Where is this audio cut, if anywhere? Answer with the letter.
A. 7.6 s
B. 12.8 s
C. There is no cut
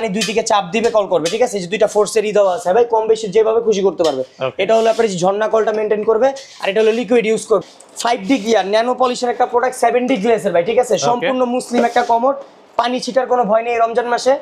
A